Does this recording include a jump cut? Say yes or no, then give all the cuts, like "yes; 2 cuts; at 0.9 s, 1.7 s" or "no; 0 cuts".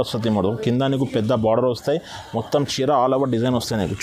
no; 0 cuts